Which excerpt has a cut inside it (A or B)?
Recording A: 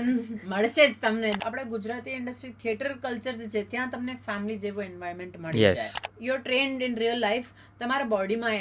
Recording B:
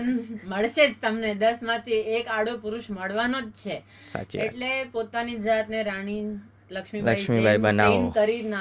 A